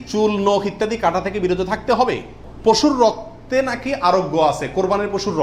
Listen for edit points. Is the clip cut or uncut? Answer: cut